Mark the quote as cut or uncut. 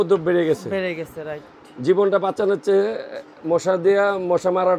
uncut